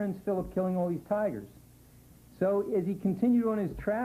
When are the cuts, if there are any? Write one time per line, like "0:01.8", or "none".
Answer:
0:01.2